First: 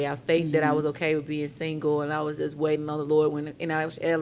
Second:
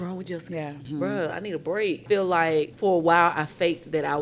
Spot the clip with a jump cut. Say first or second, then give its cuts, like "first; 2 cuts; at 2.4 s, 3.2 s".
second; 3 cuts; at 0.9 s, 2.0 s, 2.7 s